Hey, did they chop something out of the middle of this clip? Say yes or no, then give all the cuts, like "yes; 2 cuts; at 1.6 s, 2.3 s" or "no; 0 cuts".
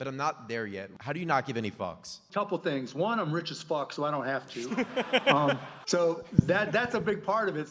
yes; 3 cuts; at 0.9 s, 2.2 s, 5.7 s